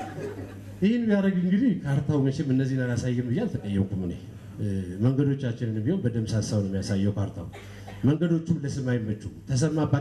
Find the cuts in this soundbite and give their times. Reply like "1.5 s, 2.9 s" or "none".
none

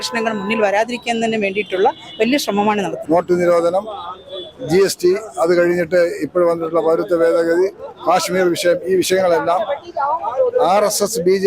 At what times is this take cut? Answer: 2.9 s

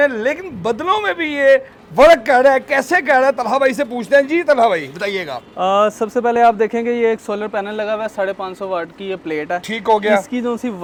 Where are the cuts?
none

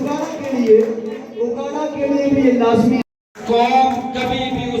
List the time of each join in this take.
none

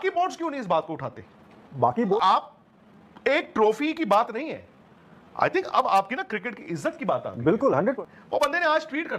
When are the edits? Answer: 2.2 s, 8.0 s

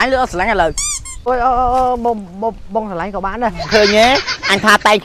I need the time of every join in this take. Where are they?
1.3 s, 3.7 s

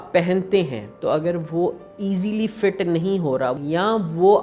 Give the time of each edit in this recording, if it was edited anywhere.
3.5 s

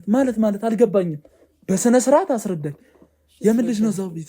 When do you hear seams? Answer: none

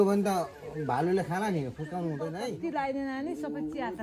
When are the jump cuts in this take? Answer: 2.4 s

